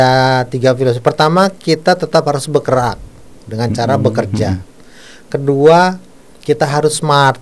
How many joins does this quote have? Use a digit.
0